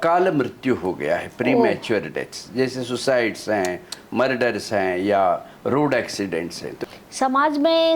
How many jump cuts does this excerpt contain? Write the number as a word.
one